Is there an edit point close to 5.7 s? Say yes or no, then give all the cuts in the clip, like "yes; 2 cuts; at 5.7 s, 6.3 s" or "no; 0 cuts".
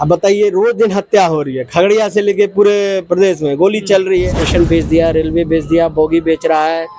no; 1 cut; at 4.4 s